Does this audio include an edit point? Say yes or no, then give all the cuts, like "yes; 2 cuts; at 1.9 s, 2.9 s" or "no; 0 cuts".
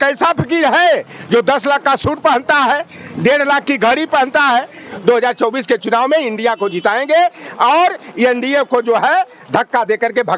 yes; 1 cut; at 4.9 s